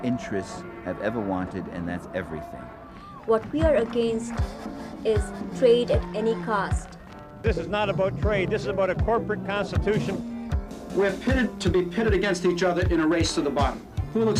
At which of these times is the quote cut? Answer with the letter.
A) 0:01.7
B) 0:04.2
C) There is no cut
B